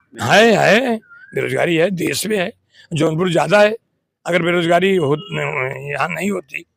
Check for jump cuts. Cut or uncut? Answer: uncut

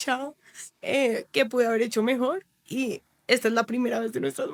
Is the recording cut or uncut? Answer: uncut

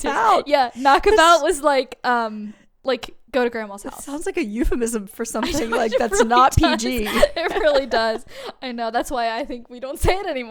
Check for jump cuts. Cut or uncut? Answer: uncut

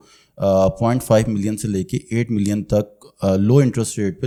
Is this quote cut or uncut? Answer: uncut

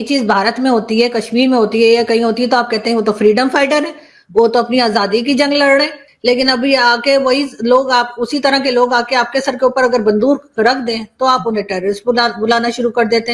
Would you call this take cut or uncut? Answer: cut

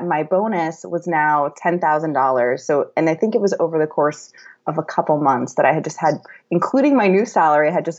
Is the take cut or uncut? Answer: uncut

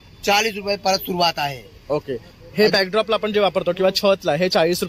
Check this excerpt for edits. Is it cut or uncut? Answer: uncut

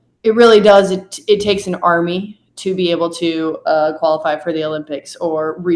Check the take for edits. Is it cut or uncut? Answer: uncut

